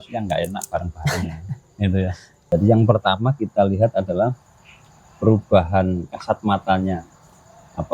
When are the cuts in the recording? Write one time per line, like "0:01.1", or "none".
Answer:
0:02.5